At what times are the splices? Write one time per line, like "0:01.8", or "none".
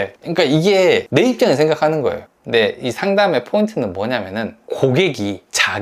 0:02.2